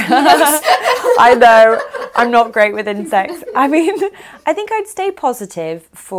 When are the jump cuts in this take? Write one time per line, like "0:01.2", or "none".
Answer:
none